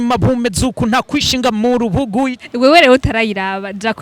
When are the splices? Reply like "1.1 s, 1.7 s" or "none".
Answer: 2.4 s